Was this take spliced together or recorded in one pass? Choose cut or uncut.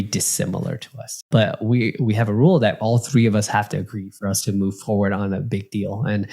cut